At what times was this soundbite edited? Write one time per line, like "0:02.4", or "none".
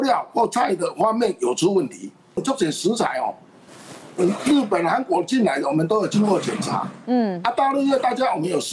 0:02.4